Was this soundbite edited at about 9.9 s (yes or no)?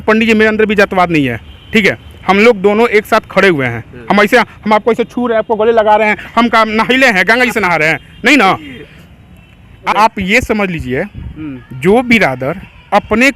yes